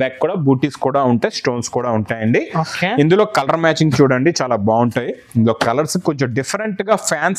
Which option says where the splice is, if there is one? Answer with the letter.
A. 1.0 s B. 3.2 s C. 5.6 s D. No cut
D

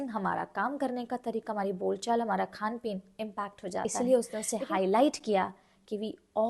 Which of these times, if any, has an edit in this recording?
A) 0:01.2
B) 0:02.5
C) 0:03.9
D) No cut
C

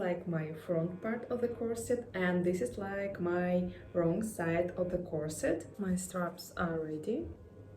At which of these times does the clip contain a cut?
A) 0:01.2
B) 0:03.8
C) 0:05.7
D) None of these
C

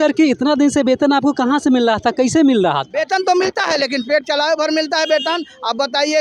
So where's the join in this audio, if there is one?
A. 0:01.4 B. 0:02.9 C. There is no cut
B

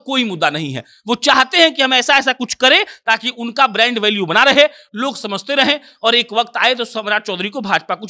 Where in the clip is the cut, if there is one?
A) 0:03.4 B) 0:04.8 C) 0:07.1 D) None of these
D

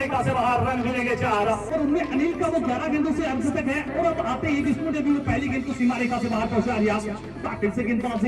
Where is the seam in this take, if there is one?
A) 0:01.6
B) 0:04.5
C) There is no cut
A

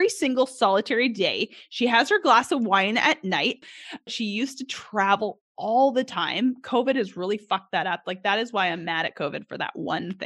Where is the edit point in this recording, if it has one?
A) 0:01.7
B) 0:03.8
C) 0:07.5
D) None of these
B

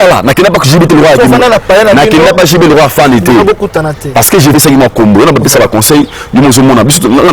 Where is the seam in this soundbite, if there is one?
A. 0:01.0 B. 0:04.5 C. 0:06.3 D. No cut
B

